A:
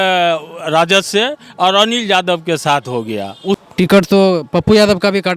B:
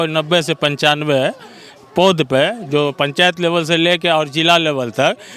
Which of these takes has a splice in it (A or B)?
A